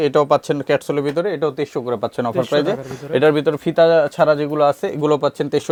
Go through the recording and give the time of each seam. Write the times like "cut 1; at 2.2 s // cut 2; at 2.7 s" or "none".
none